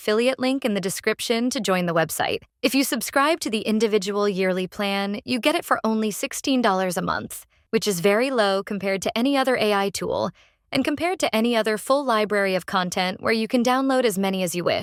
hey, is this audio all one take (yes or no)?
yes